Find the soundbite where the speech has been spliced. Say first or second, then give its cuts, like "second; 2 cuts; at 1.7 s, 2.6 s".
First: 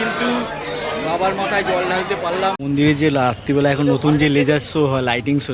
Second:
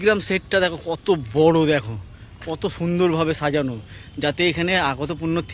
first; 1 cut; at 2.6 s